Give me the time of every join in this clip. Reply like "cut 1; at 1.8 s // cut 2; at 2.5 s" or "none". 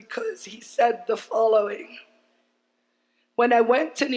cut 1; at 1.3 s